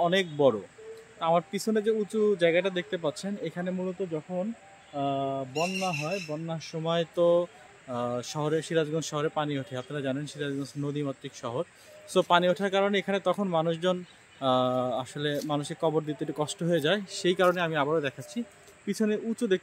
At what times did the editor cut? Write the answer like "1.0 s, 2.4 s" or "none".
none